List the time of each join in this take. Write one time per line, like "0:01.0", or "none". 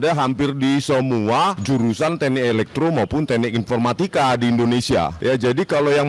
0:01.6
0:05.1

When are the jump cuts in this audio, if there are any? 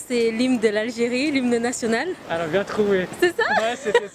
none

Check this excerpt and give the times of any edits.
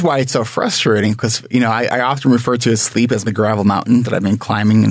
0:03.2

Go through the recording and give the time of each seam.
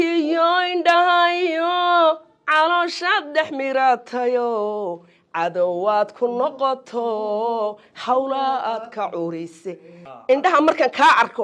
0:10.1

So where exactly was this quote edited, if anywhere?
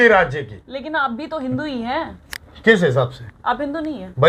none

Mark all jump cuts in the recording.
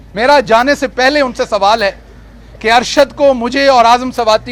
none

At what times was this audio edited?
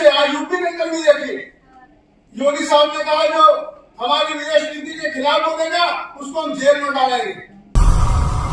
0:07.6

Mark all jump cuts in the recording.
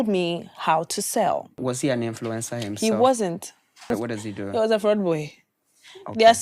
0:01.6
0:03.9

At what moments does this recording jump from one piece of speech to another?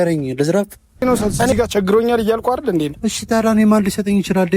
0:01.0

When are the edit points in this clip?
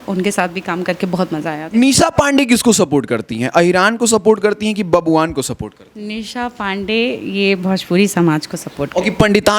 0:01.7

